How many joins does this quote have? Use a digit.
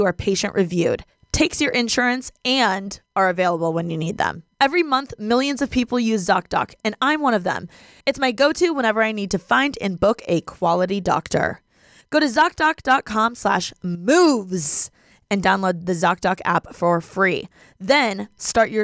0